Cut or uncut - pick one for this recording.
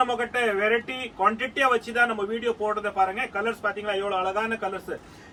uncut